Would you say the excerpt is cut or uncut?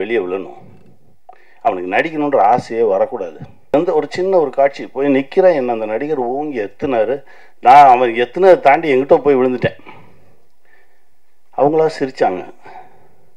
cut